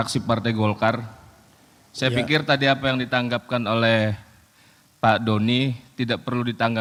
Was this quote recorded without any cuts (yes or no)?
yes